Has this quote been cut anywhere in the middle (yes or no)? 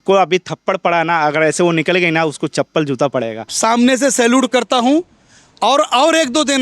yes